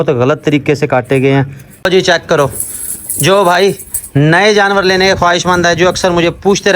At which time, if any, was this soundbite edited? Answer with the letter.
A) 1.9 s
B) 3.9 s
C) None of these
A